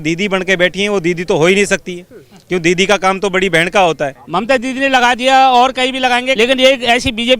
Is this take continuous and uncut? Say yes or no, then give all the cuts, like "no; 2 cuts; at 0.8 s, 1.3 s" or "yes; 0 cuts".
no; 2 cuts; at 4.2 s, 6.3 s